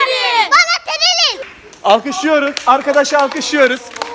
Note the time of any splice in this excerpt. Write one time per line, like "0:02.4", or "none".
0:01.4